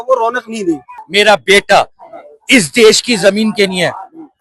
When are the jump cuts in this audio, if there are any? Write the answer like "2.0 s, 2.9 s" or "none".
0.9 s